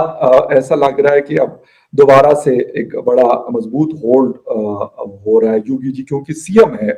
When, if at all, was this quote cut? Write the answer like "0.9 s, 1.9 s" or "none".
none

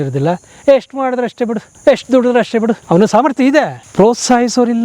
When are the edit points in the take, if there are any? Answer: 1.7 s, 2.8 s, 3.8 s

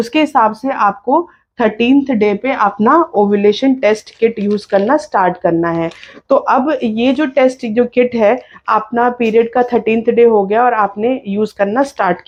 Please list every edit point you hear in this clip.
none

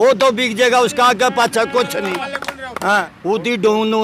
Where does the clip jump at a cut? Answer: 3.1 s

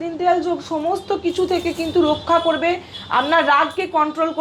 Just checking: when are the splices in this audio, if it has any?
none

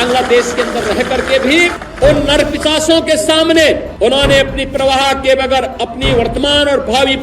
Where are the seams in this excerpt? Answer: 1.8 s, 3.9 s

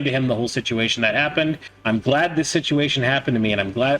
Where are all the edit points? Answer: 1.7 s

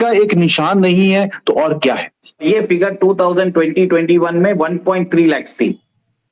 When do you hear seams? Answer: 2.4 s

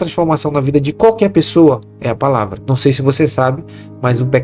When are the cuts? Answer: 2.6 s

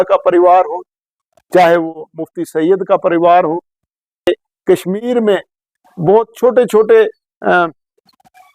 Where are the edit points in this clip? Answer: 4.3 s

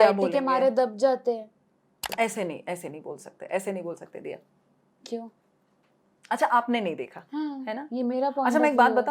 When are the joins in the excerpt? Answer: 2.0 s

